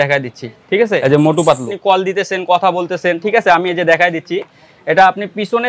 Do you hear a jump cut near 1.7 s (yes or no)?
yes